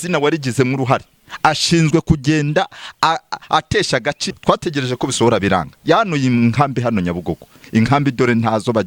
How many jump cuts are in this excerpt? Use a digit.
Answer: 1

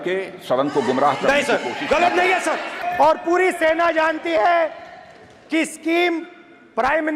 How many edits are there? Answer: 1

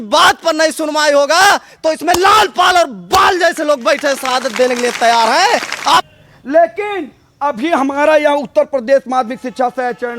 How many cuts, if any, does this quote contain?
1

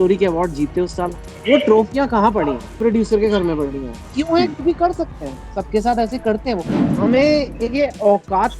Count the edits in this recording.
4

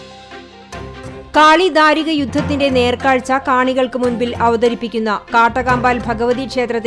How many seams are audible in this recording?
1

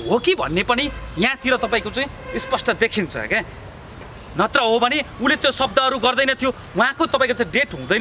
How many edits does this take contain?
0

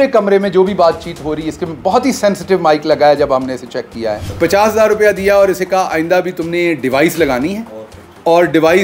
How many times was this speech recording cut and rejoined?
1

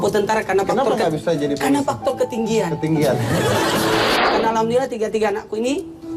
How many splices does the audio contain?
1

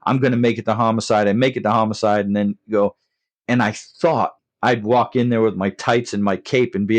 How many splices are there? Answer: 1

